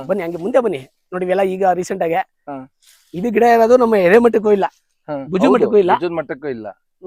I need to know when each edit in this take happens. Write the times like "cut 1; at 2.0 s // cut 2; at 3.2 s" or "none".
none

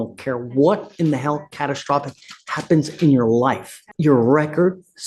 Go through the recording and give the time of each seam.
cut 1; at 3.8 s

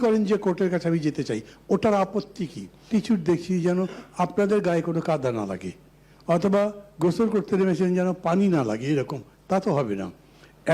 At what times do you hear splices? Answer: cut 1; at 2.9 s

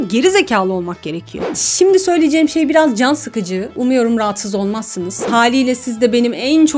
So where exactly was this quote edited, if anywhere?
cut 1; at 1.4 s // cut 2; at 5.3 s

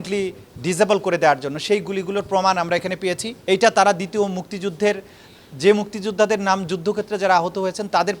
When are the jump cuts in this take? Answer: cut 1; at 3.3 s

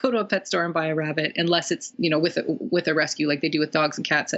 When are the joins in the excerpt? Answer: cut 1; at 1.9 s

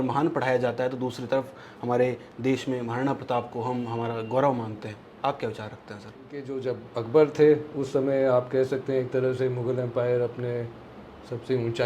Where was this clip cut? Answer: cut 1; at 6.5 s

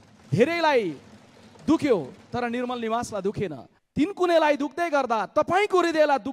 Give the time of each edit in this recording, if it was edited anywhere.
cut 1; at 3.7 s

